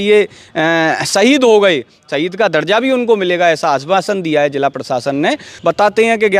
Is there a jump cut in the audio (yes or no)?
yes